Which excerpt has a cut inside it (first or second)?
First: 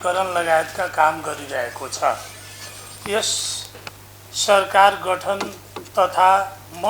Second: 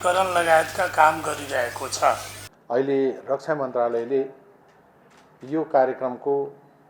second